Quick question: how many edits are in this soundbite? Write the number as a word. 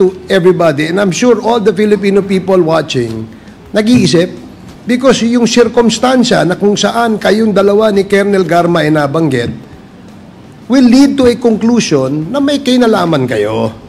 one